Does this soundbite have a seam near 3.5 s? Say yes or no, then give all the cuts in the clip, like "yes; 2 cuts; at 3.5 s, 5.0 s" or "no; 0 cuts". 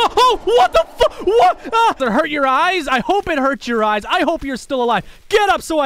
no; 1 cut; at 2.0 s